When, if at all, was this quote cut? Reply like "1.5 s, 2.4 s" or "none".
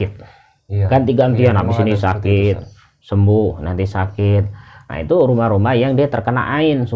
none